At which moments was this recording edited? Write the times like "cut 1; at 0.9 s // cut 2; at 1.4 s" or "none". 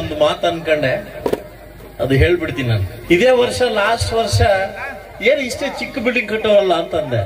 cut 1; at 2.9 s